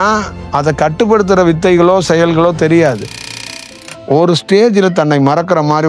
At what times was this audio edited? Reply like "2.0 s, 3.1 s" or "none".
3.6 s